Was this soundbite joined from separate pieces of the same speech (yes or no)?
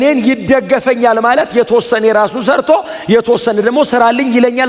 no